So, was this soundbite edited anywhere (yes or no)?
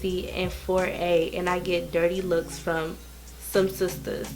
no